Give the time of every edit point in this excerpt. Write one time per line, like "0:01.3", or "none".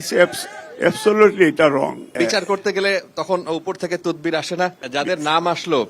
0:02.1
0:04.8